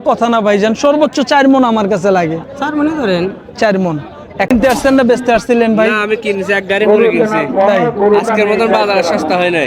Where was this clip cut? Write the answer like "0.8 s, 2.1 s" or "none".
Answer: 4.5 s